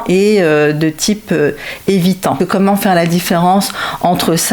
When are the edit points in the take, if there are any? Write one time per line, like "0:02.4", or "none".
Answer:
0:02.4